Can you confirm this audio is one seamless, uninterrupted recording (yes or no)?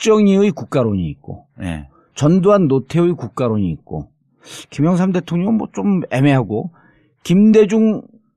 no